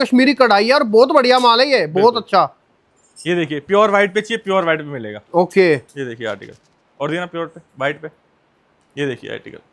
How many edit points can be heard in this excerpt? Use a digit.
0